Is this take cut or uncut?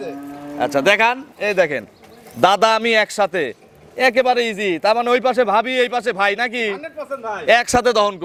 uncut